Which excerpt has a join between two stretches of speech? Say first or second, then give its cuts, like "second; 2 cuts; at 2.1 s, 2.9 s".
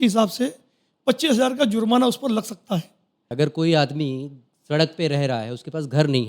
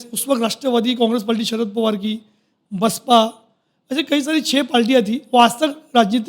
first; 1 cut; at 3.3 s